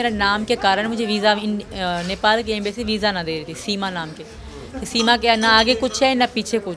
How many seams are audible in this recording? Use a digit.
0